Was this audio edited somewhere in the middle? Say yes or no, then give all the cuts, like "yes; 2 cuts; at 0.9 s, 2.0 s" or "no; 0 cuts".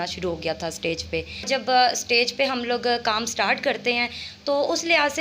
yes; 1 cut; at 1.5 s